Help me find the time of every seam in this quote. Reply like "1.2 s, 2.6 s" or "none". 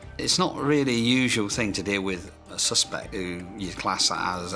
3.2 s